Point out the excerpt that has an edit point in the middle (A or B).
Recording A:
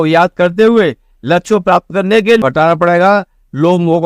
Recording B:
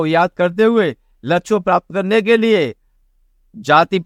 A